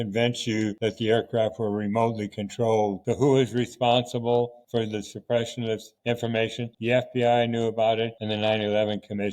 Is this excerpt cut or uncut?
cut